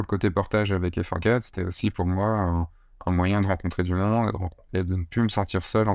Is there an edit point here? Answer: no; 0 cuts

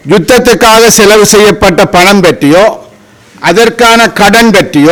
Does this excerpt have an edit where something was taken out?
no; 0 cuts

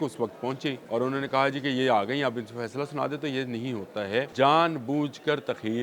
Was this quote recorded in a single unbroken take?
no; 2 cuts; at 0.8 s, 4.3 s

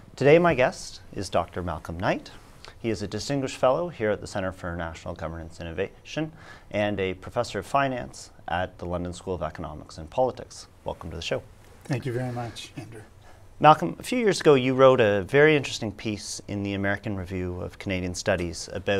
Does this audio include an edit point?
no; 0 cuts

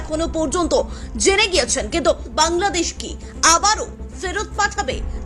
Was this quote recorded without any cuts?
no; 1 cut; at 2.3 s

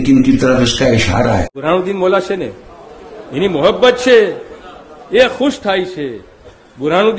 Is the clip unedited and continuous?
no; 1 cut; at 1.5 s

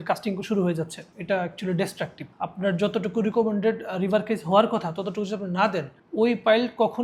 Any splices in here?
no; 0 cuts

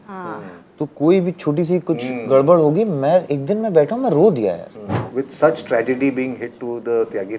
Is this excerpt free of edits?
no; 1 cut; at 5.0 s

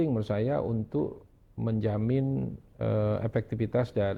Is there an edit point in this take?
no; 0 cuts

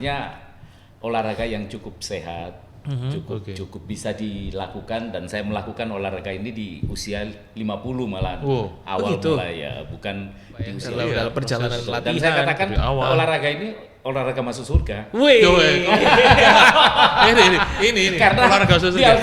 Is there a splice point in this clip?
yes; 1 cut; at 10.8 s

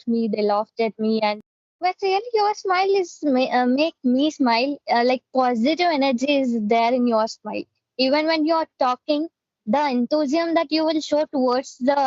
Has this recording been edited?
yes; 1 cut; at 1.4 s

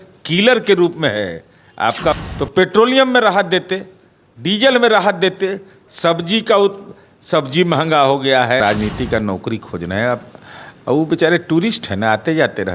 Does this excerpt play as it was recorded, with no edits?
no; 2 cuts; at 2.2 s, 8.6 s

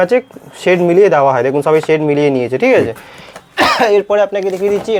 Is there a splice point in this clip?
no; 0 cuts

